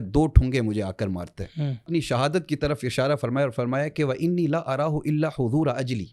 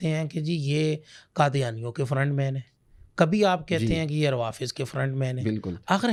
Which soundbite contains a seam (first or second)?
first